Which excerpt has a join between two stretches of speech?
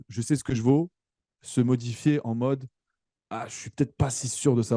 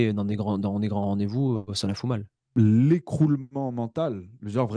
second; 1 cut; at 2.3 s

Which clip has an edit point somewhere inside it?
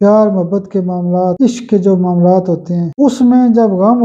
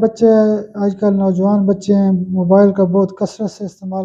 first; 2 cuts; at 1.4 s, 2.9 s

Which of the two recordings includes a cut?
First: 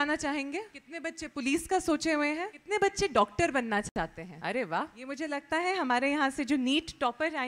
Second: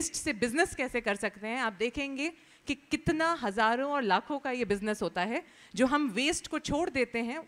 first; 4 cuts; at 1.0 s, 2.6 s, 4.3 s, 5.3 s

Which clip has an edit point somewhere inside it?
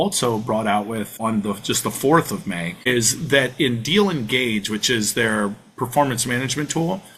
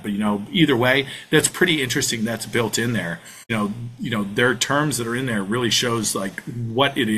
second; 1 cut; at 3.5 s

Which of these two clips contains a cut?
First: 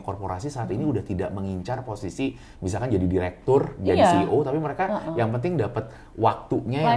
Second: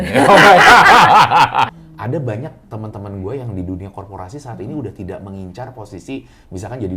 second; 1 cut; at 1.7 s

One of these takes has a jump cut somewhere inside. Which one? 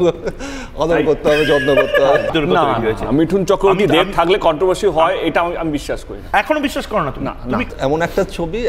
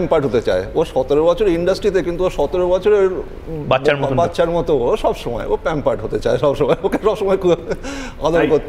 first; 2 cuts; at 2.3 s, 7.7 s

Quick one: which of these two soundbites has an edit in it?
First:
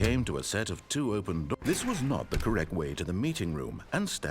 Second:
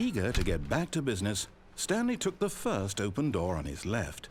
first; 1 cut; at 1.6 s

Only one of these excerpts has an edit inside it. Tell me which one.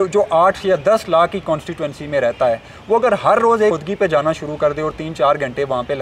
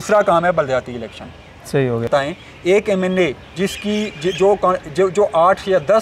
second; 1 cut; at 2.1 s

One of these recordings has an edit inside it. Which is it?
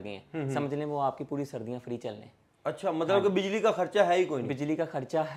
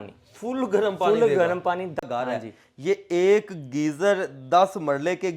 second; 1 cut; at 2.0 s

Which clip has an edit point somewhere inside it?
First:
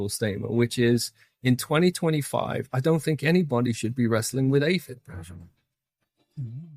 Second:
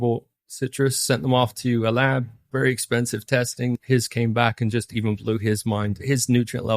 second; 2 cuts; at 3.8 s, 6.0 s

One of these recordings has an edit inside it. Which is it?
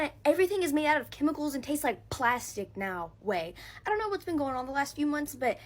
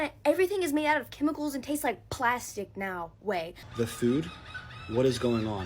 second; 1 cut; at 3.6 s

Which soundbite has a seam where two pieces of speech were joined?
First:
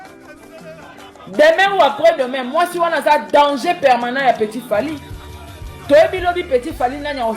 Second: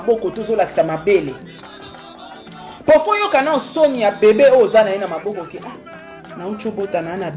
first; 1 cut; at 1.2 s

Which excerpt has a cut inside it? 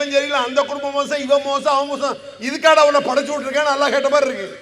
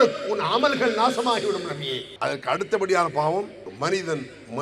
second; 2 cuts; at 2.0 s, 3.6 s

